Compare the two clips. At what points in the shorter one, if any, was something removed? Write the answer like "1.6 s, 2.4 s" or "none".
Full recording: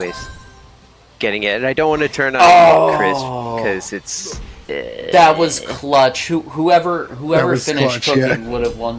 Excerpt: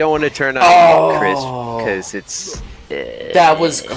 none